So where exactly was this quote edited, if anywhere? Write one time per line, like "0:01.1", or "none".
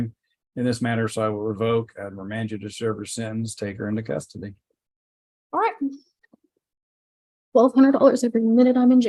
none